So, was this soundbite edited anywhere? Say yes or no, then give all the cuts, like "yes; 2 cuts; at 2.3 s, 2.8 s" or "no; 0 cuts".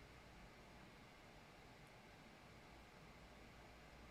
no; 0 cuts